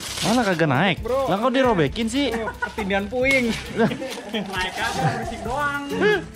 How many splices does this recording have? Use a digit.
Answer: 0